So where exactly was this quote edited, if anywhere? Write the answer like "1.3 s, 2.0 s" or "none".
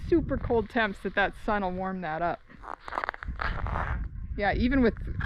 none